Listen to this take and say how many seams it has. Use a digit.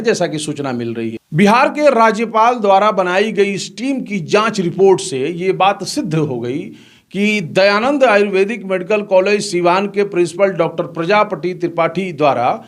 1